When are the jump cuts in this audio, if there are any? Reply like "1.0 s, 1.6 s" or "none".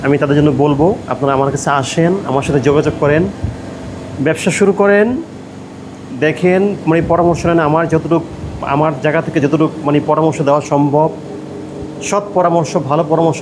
none